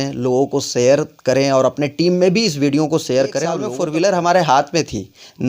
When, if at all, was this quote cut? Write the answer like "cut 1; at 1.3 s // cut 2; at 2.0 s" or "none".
cut 1; at 3.7 s